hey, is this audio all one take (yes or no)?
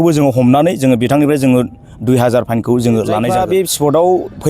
no